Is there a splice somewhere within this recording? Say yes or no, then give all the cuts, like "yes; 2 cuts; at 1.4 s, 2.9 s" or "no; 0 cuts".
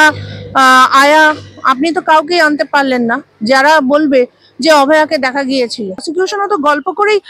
yes; 1 cut; at 6.1 s